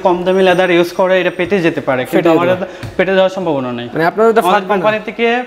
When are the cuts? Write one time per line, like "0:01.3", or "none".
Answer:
none